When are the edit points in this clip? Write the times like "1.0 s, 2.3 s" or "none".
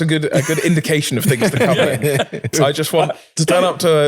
2.5 s